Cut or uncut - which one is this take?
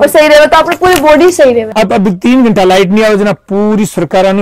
cut